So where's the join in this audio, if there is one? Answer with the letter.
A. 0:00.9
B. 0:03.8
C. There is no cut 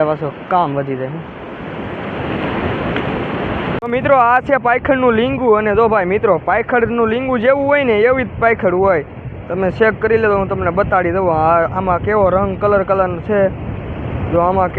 B